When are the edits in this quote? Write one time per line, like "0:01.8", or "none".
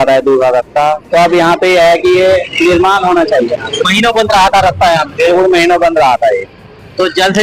none